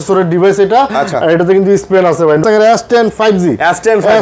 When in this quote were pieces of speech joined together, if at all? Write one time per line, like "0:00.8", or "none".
0:02.4